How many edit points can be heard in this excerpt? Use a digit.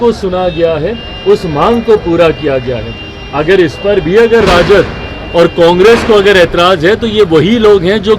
0